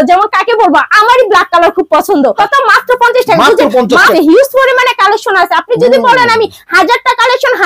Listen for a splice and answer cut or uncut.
cut